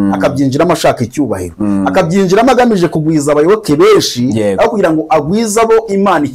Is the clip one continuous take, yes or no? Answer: yes